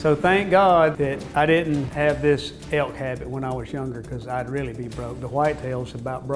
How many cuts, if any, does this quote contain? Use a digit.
3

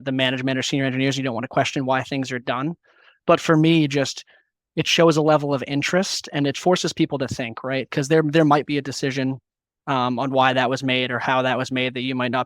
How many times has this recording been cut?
1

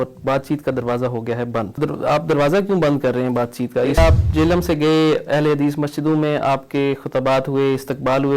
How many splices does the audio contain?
2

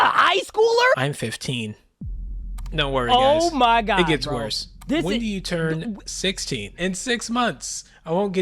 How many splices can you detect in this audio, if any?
2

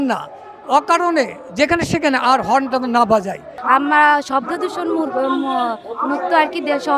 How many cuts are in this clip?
1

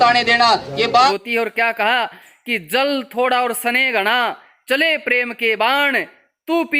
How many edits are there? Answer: 1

